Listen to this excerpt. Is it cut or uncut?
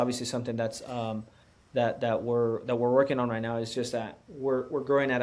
uncut